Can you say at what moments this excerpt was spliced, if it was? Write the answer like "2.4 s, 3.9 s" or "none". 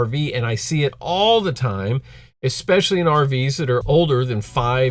3.8 s

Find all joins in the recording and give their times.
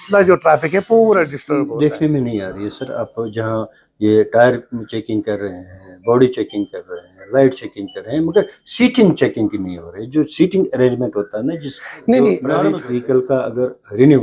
1.4 s, 12.8 s

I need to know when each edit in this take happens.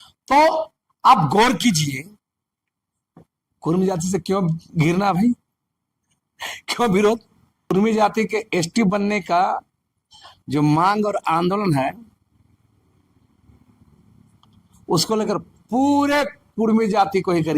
7.7 s

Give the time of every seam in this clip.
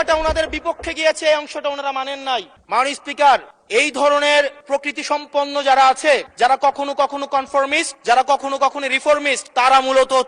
2.5 s, 3.6 s, 4.6 s, 6.3 s, 7.9 s, 9.4 s

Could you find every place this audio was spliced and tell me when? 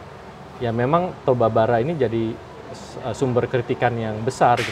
none

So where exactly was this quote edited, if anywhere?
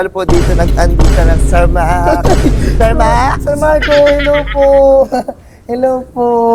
none

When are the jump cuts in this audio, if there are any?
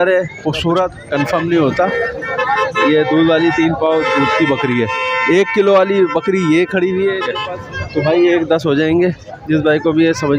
1.0 s, 7.3 s

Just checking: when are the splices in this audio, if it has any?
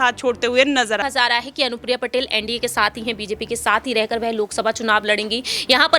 1.0 s

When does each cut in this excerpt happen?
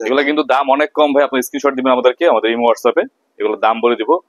none

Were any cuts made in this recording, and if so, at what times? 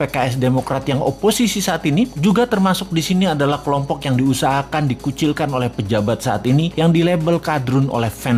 none

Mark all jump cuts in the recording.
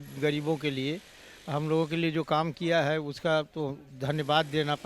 none

